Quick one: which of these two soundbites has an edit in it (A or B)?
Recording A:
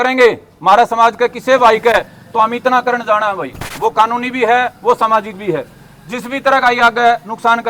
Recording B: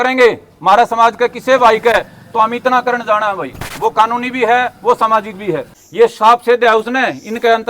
B